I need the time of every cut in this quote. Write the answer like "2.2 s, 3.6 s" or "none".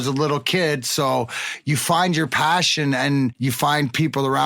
1.4 s, 3.4 s